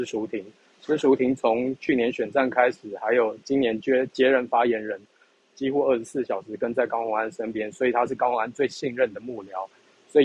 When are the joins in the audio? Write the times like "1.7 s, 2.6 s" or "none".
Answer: none